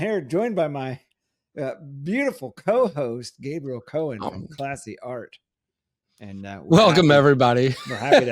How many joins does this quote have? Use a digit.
1